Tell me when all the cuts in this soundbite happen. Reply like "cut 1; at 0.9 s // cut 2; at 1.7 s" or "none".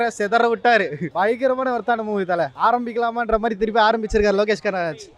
cut 1; at 1.0 s // cut 2; at 2.5 s